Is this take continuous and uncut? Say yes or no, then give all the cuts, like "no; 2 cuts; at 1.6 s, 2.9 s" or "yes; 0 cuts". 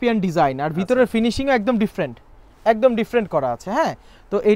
yes; 0 cuts